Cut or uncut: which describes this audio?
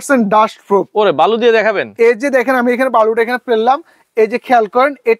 uncut